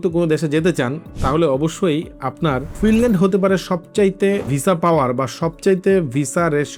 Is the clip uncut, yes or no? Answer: no